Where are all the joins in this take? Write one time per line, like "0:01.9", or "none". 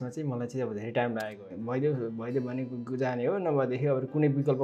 0:01.4